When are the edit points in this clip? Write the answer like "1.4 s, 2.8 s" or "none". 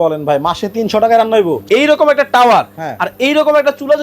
1.6 s